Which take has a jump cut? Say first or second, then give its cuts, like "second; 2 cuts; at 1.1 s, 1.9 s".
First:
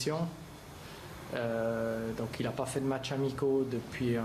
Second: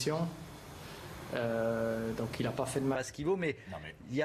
first; 1 cut; at 3.0 s